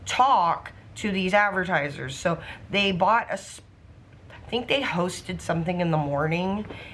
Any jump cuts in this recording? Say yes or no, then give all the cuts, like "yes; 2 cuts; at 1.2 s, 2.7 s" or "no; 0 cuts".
no; 0 cuts